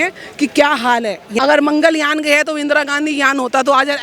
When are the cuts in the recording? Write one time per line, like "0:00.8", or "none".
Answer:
0:01.3